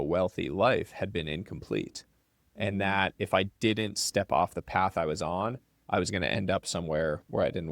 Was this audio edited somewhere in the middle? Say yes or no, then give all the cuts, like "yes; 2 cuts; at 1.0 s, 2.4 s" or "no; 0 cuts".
no; 0 cuts